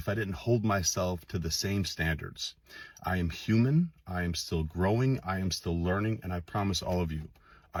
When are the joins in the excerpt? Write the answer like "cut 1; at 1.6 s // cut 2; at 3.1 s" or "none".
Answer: none